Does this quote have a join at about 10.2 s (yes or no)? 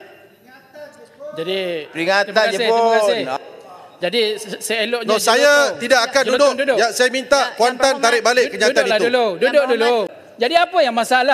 yes